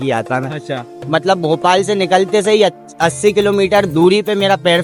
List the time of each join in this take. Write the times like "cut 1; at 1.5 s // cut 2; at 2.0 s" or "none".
none